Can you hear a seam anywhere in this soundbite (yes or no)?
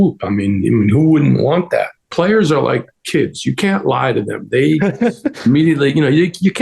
yes